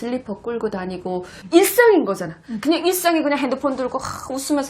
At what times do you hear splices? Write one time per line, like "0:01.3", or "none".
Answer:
0:01.3